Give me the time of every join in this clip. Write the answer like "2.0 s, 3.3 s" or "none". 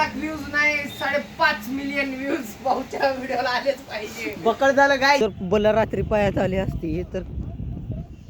5.2 s

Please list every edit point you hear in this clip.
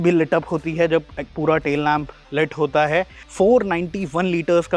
3.2 s

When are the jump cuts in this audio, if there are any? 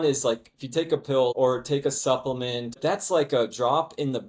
1.3 s, 2.8 s

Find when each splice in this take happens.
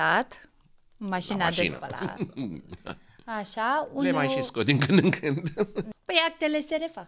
5.8 s

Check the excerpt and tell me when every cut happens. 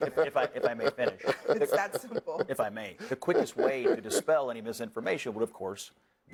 none

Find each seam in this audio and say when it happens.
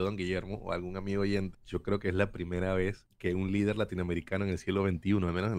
1.6 s, 3.1 s

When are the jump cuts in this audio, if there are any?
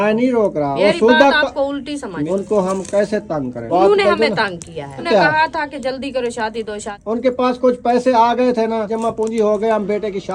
0.8 s, 2.2 s, 3.7 s, 5.1 s, 6.9 s, 8.9 s

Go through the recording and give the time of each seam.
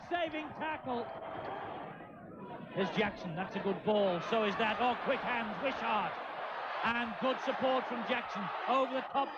1.9 s

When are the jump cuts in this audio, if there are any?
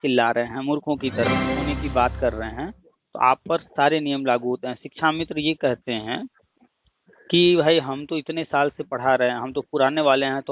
1.3 s

